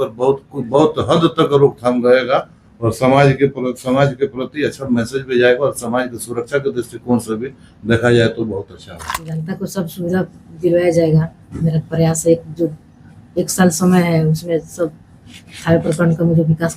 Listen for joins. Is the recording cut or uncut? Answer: cut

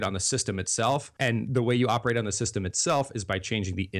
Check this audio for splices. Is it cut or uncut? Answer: cut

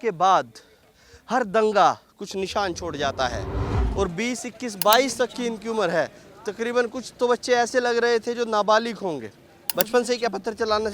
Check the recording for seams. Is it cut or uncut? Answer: cut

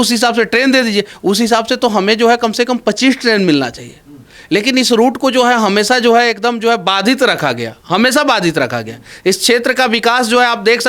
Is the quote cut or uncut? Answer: uncut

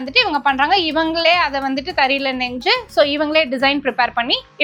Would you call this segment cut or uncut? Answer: uncut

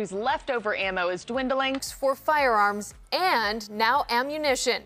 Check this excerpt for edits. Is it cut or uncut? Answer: uncut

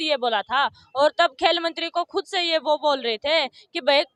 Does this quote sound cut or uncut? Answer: uncut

